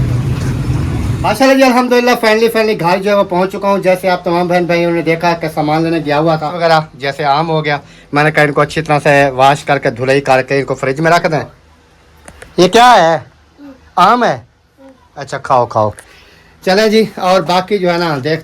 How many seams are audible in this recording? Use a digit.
3